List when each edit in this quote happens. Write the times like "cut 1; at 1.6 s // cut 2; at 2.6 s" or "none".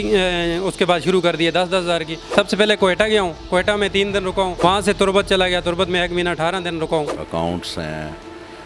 cut 1; at 2.2 s // cut 2; at 4.5 s // cut 3; at 7.2 s